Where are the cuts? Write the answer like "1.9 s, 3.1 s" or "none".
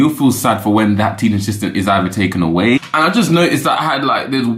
2.8 s